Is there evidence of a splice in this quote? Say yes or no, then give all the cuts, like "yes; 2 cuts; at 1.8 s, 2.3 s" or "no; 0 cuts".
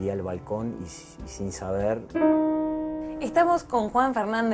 no; 0 cuts